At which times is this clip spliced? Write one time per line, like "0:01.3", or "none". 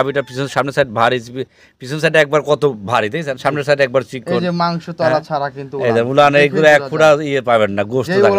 none